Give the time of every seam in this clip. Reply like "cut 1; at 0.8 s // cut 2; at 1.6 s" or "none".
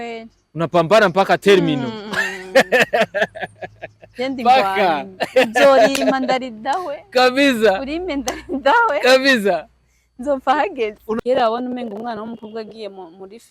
cut 1; at 11.2 s